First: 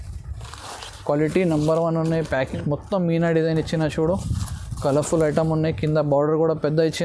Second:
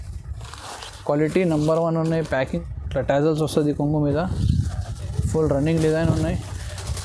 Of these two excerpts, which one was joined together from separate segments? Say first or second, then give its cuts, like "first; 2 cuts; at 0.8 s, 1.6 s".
second; 1 cut; at 2.6 s